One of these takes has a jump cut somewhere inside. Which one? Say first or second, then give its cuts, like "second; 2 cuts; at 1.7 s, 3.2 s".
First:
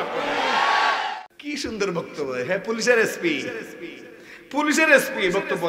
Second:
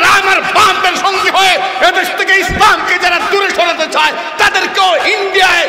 first; 1 cut; at 1.1 s